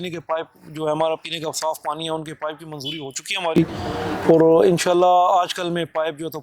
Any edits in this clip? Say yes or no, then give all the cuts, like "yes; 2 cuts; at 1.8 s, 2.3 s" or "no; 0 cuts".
no; 0 cuts